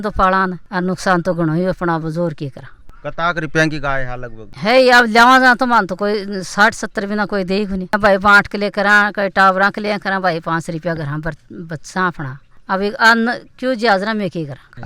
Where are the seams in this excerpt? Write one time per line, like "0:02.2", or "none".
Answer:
none